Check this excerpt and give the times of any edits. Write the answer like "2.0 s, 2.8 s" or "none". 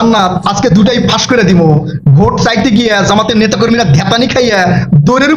none